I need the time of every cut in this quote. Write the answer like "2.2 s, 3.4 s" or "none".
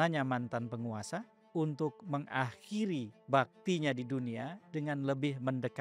1.4 s, 3.2 s